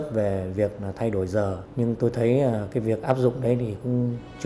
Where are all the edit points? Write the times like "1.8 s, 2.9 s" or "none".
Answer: 1.6 s